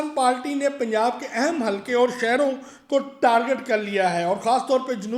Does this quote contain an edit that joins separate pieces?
no; 0 cuts

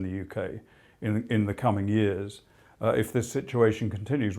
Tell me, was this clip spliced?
no; 0 cuts

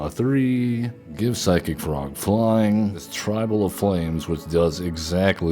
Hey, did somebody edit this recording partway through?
yes; 2 cuts; at 1.0 s, 3.1 s

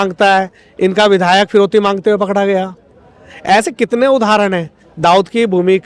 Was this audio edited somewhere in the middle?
no; 0 cuts

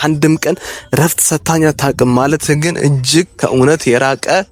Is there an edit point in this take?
no; 0 cuts

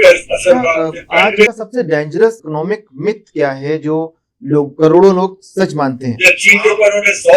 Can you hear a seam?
yes; 2 cuts; at 1.5 s, 6.1 s

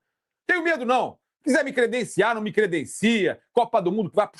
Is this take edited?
no; 0 cuts

